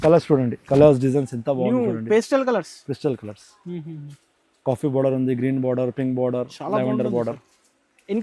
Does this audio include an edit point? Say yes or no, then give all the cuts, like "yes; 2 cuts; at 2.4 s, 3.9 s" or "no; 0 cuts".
no; 0 cuts